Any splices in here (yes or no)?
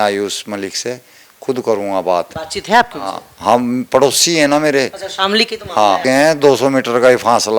yes